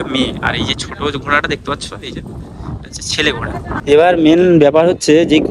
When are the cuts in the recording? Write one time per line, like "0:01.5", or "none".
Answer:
0:03.8